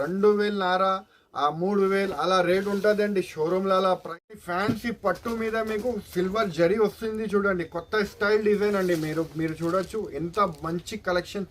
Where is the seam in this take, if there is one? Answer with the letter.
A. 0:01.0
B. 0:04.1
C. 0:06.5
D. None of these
B